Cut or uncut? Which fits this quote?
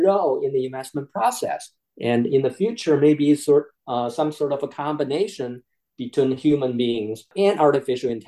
cut